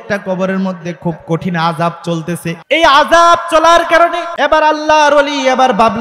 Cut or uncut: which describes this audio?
cut